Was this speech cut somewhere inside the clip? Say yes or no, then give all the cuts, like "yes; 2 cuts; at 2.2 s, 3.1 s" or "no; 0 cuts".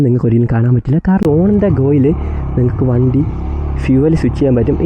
yes; 1 cut; at 1.2 s